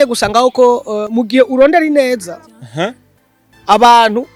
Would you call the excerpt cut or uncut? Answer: uncut